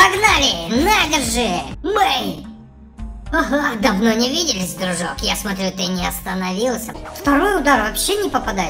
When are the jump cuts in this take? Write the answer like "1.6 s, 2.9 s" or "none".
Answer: 1.7 s, 7.0 s